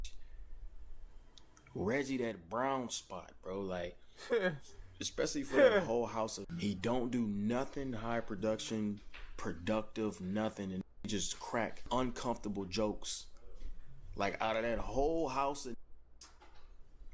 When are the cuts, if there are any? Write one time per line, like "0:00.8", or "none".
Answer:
0:06.4
0:11.8